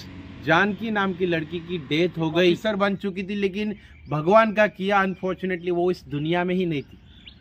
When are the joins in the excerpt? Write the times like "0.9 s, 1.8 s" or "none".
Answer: 2.6 s